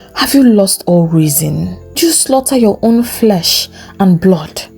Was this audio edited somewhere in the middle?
yes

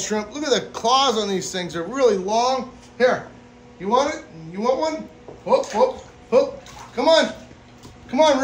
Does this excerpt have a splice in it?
no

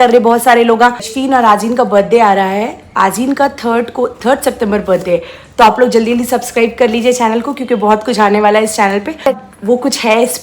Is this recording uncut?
no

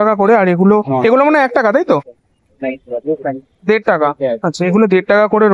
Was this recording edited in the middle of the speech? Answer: no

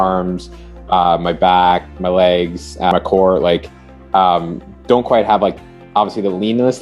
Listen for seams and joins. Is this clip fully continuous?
no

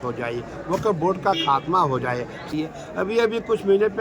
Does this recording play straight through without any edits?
no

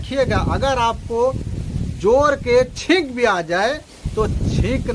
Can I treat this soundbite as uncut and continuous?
no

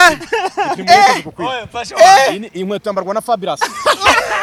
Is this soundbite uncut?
yes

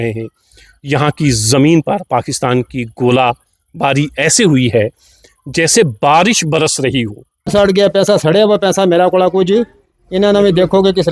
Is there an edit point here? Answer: yes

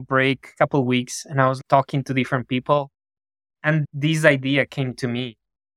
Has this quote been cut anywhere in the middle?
yes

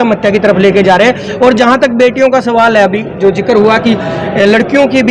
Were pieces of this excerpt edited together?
no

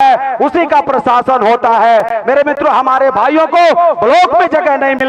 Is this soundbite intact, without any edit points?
yes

